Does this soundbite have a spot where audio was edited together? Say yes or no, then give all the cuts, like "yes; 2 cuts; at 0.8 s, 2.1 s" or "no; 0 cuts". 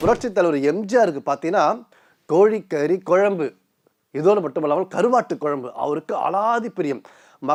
no; 0 cuts